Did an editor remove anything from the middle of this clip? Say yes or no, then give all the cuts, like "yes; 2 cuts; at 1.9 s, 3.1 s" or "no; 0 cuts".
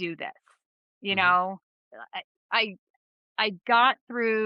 no; 0 cuts